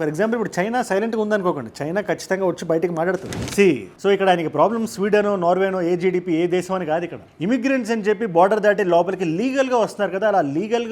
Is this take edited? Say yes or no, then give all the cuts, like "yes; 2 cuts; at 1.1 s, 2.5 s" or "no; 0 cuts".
yes; 1 cut; at 3.4 s